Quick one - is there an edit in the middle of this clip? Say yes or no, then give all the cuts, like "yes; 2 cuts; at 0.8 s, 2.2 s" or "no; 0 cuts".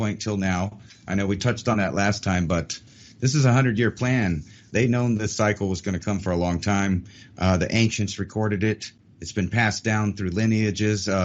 yes; 1 cut; at 4.7 s